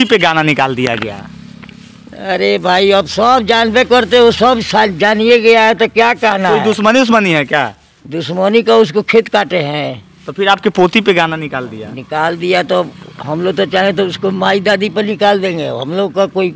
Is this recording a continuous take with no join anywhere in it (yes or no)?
yes